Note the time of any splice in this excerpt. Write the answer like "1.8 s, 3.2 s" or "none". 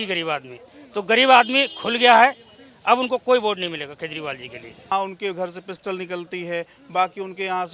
4.9 s